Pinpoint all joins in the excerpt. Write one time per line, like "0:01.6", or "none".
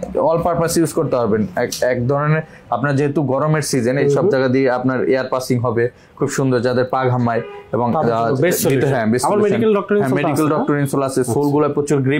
none